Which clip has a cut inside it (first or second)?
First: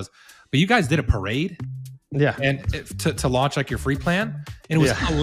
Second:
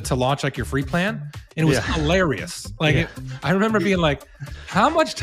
first